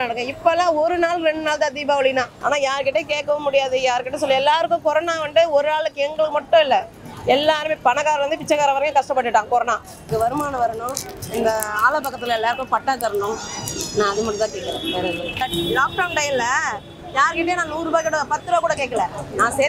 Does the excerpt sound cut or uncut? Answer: cut